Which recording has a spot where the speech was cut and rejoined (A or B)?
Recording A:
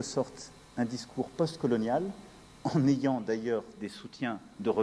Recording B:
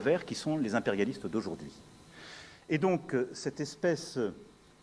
B